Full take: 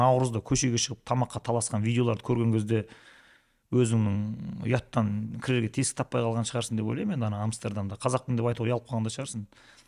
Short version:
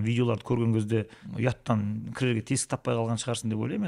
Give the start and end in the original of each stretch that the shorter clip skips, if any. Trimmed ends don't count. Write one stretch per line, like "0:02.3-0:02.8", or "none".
0:03.0-0:04.5